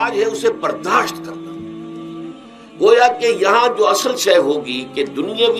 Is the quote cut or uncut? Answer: cut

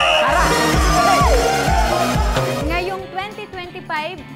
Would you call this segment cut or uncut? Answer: cut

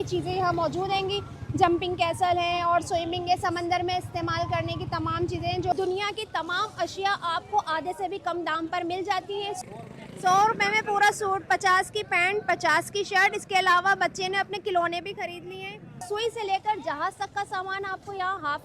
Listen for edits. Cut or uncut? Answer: cut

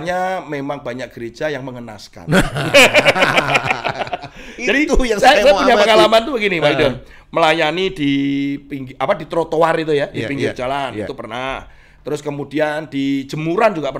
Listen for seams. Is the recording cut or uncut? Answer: uncut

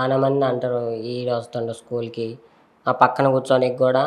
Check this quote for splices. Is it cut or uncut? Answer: uncut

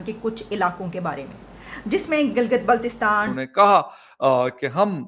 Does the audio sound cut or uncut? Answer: cut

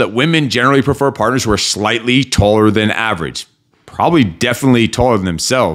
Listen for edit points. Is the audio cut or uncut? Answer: uncut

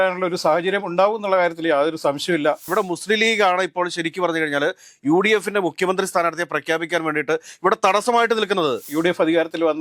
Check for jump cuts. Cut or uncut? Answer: cut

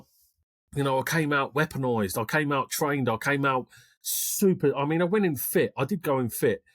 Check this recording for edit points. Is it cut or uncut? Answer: uncut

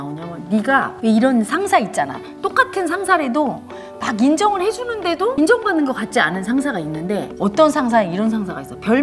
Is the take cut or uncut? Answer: cut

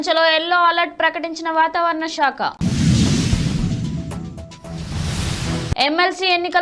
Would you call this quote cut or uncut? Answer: cut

